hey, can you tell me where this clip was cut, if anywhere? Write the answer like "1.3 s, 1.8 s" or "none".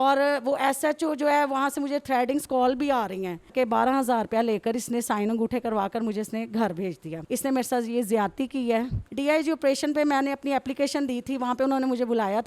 3.5 s, 7.1 s, 9.1 s